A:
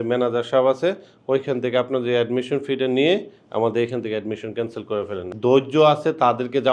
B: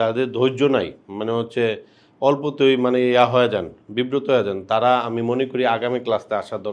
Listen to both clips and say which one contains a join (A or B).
A